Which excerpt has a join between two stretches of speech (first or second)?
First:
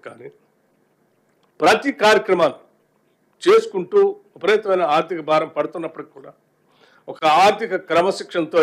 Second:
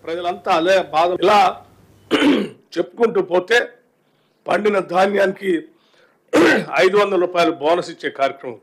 second